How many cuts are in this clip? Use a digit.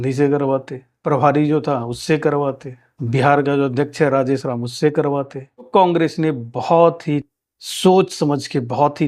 1